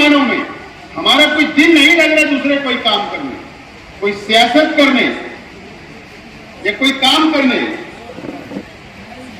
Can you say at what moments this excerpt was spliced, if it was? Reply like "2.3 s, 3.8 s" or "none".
none

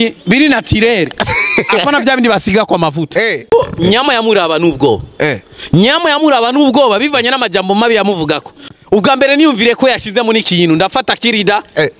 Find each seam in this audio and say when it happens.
3.5 s, 8.5 s

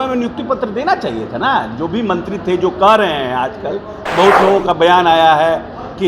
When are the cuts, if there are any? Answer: 4.0 s

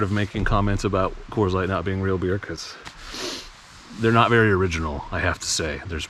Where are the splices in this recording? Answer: none

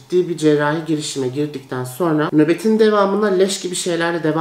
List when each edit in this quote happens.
none

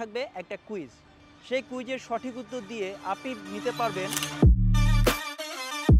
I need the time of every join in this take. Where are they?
4.2 s

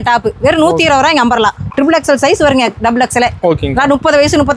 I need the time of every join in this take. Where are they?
1.7 s

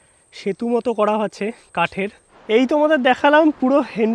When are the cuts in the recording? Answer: 2.3 s

